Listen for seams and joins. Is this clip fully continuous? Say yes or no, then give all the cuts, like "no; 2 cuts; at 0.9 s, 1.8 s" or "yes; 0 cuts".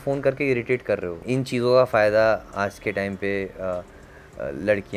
no; 1 cut; at 1.1 s